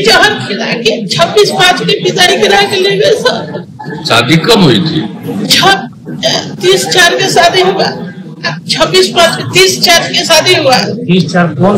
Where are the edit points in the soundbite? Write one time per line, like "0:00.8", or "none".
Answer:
none